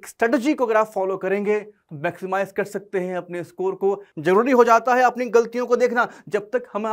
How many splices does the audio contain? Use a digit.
1